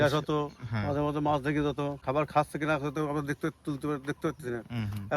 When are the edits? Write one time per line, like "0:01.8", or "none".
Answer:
0:02.0